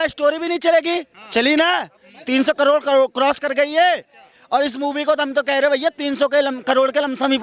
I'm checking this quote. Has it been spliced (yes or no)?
no